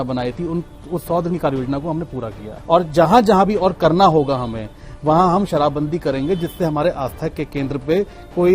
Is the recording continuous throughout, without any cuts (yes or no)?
no